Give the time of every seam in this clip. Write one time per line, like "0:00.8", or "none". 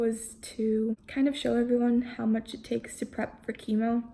0:01.0